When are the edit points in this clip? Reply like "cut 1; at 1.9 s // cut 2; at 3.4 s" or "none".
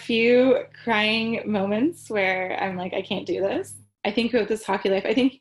cut 1; at 3.8 s